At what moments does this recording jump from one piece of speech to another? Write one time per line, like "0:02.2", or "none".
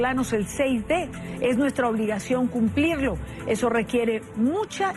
none

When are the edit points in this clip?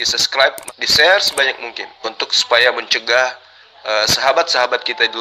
none

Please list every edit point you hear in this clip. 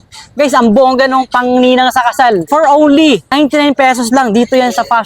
0:02.4
0:03.3

